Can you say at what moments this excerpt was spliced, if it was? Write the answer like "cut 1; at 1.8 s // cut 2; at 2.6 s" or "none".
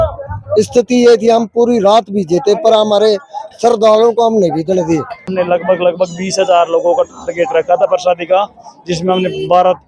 cut 1; at 5.3 s